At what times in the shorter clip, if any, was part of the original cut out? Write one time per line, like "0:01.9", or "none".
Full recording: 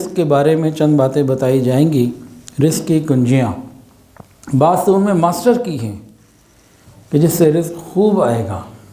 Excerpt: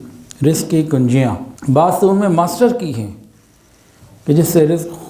0:01.5